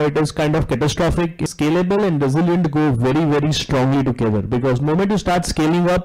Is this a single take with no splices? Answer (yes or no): no